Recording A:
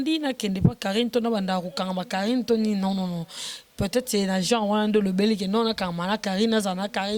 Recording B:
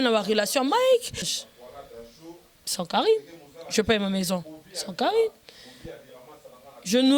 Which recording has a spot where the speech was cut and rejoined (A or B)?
B